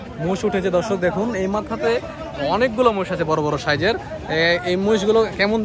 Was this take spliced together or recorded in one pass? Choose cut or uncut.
uncut